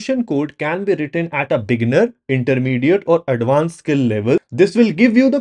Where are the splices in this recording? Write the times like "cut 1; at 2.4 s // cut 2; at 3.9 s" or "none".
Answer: cut 1; at 4.5 s